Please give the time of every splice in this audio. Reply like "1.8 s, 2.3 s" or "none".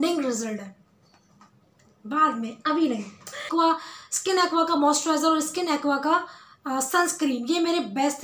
3.4 s